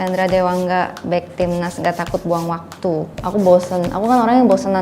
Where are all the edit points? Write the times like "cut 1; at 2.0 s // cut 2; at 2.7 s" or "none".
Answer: cut 1; at 3.2 s